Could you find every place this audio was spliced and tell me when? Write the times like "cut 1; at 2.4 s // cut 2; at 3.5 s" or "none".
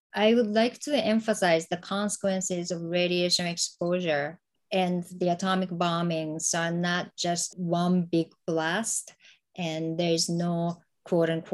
cut 1; at 7.5 s